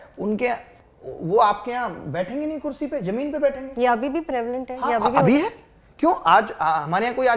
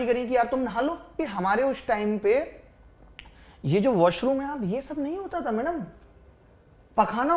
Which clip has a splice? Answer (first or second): second